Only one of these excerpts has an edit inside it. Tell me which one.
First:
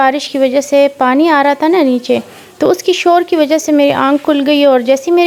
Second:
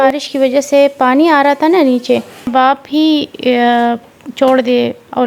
second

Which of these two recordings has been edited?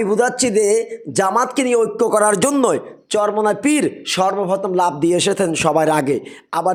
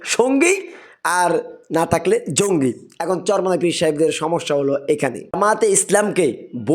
second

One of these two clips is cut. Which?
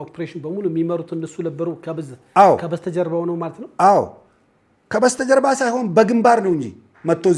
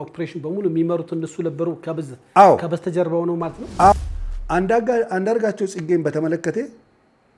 second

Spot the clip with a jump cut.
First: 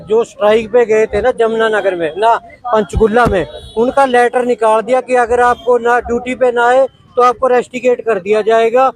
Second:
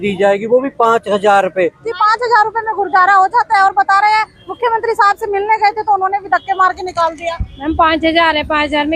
second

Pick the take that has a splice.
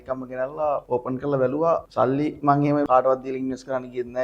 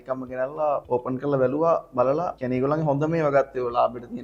first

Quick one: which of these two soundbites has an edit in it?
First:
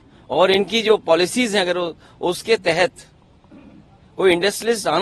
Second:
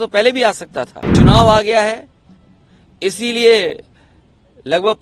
second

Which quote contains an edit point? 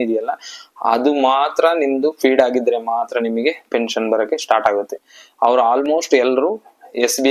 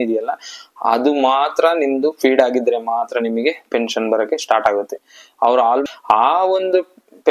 second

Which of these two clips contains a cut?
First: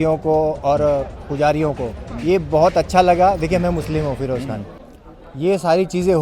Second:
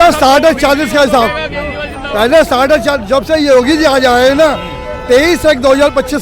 first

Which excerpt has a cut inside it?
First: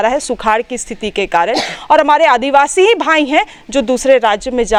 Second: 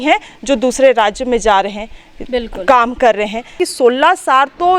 second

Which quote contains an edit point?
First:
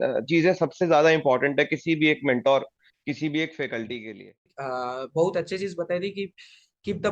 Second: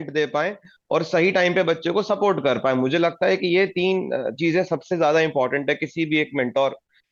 first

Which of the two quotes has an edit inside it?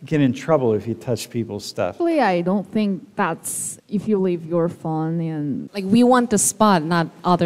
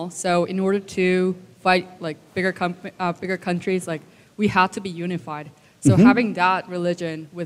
first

